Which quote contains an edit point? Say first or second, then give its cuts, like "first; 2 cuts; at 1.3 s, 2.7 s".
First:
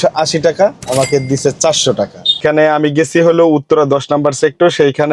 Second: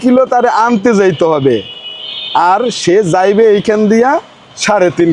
first; 1 cut; at 2.4 s